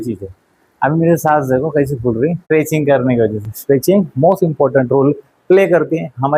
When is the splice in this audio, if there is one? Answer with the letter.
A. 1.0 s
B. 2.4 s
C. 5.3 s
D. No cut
B